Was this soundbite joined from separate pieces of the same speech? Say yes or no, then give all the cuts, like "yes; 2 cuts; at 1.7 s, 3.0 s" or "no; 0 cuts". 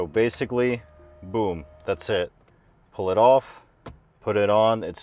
no; 0 cuts